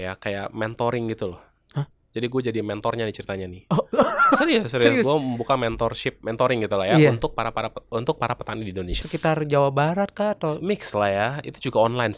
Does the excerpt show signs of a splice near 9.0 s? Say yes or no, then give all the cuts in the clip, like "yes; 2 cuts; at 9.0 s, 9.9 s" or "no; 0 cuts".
yes; 1 cut; at 9.0 s